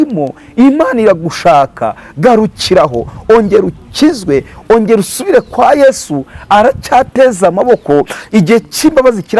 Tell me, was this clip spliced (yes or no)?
no